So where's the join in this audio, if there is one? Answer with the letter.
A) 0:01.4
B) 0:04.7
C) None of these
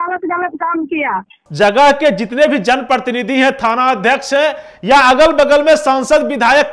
A